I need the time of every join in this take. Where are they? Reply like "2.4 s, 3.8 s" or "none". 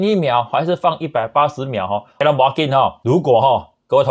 2.2 s, 3.0 s